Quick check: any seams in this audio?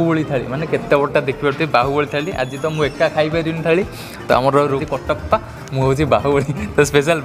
yes; 1 cut; at 4.8 s

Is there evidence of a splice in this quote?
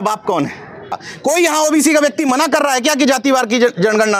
yes; 1 cut; at 1.1 s

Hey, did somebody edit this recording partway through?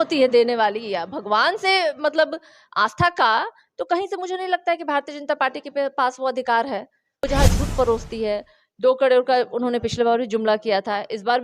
yes; 1 cut; at 7.2 s

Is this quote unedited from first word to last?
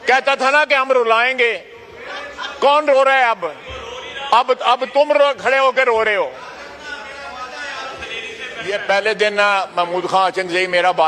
no; 1 cut; at 8.5 s

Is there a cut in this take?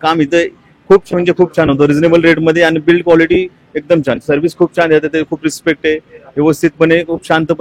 no; 0 cuts

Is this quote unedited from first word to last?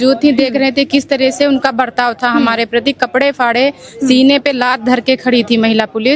yes; 0 cuts

